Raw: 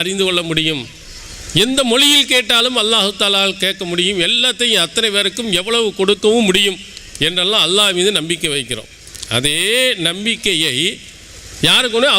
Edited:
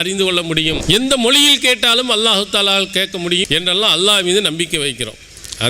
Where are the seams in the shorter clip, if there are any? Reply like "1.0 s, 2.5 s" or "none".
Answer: 0.8 s, 3.4 s